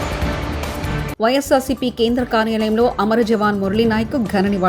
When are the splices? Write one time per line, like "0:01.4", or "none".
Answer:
0:01.0